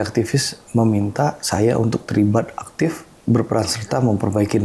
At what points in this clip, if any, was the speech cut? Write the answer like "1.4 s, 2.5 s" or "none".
none